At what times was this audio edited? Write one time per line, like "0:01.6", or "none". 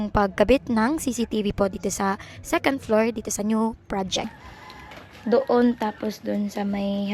0:04.3